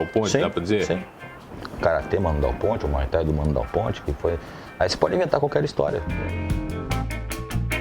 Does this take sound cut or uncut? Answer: cut